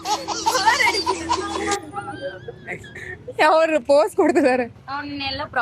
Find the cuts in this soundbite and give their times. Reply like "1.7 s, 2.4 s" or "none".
4.7 s